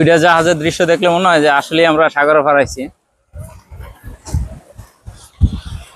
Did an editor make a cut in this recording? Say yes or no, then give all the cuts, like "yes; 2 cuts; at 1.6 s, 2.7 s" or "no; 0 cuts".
no; 0 cuts